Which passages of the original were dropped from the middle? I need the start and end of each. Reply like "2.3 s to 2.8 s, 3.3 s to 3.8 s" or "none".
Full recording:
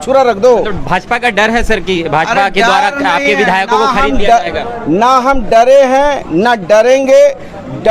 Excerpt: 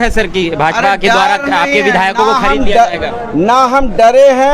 none